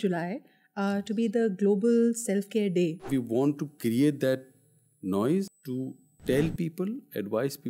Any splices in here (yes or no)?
yes